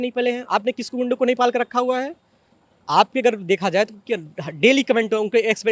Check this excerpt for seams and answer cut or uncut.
uncut